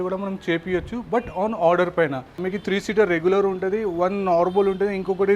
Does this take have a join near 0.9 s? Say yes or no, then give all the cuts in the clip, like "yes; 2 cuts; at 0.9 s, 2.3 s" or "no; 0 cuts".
no; 1 cut; at 2.4 s